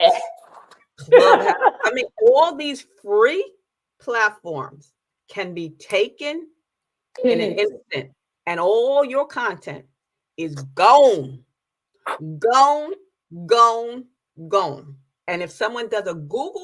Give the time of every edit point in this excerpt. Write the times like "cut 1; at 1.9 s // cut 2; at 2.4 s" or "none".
cut 1; at 15.2 s